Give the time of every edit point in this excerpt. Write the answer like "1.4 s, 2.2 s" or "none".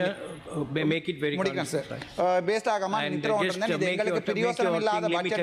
none